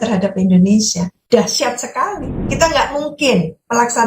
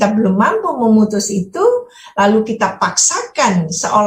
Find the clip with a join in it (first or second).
first